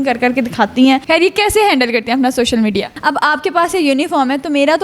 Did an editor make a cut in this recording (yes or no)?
yes